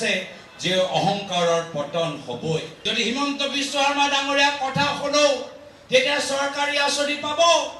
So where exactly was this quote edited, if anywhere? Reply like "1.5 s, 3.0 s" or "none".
2.7 s